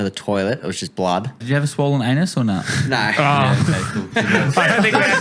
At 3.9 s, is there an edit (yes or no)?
no